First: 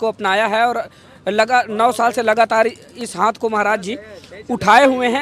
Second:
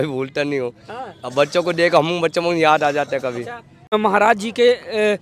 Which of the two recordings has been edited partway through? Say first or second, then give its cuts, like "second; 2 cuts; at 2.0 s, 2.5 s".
second; 1 cut; at 3.9 s